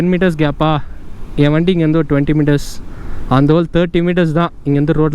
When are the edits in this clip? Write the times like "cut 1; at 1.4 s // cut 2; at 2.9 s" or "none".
none